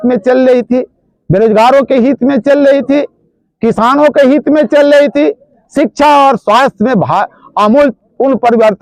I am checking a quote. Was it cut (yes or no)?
no